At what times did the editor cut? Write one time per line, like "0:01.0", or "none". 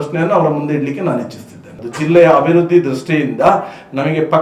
0:01.7